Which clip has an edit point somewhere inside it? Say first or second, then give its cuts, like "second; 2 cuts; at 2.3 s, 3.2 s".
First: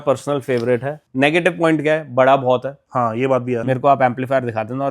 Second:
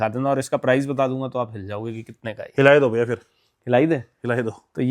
first; 2 cuts; at 1.0 s, 3.6 s